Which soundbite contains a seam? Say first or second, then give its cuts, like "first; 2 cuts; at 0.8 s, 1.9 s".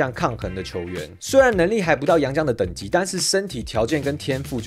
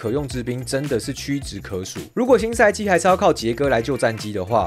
second; 1 cut; at 2.0 s